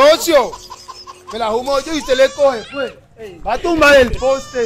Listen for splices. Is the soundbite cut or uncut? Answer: uncut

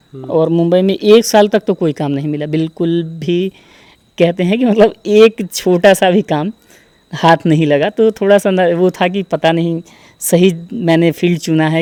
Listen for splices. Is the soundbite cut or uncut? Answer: uncut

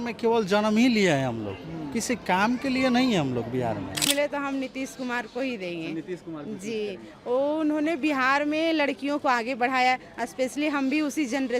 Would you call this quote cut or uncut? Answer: cut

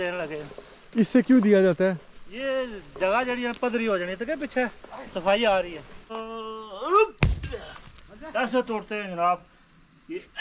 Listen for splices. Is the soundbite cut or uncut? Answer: cut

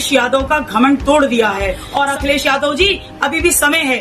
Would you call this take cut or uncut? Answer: cut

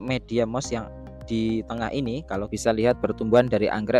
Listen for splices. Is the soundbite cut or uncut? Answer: cut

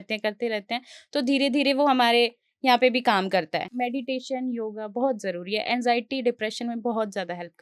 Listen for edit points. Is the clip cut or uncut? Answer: cut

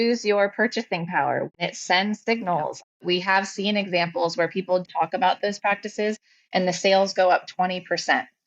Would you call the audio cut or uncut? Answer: cut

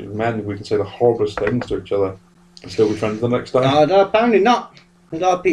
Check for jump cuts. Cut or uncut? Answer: uncut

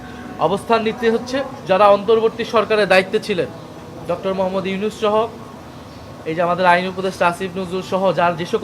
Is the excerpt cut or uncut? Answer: cut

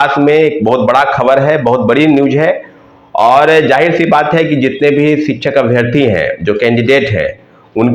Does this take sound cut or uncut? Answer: uncut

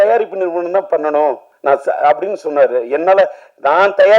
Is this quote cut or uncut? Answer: cut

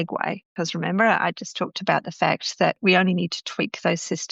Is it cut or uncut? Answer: uncut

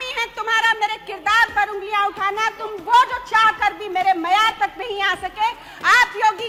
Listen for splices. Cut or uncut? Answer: uncut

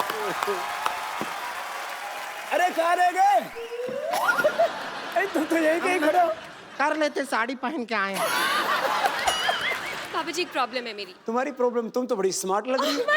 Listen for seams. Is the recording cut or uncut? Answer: cut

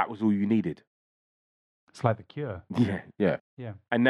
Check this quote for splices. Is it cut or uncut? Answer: uncut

